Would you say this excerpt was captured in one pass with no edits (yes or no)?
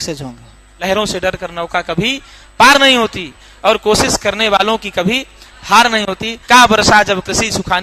no